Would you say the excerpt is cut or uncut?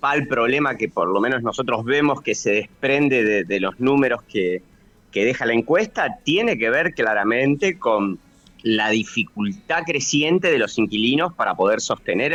uncut